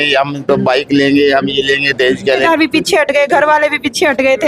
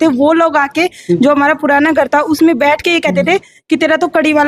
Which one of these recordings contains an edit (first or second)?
first